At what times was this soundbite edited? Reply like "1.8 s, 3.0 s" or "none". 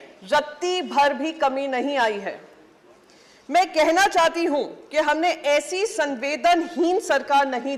none